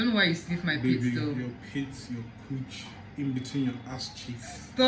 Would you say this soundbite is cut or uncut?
uncut